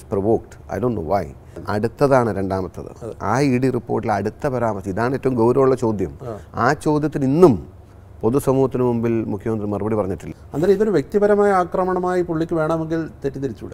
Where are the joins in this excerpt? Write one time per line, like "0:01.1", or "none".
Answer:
0:01.6
0:10.3